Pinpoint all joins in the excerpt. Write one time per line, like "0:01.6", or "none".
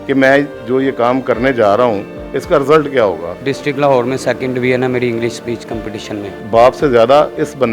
0:03.3
0:06.4